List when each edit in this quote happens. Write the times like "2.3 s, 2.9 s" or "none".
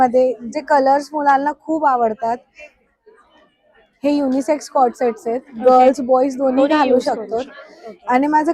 none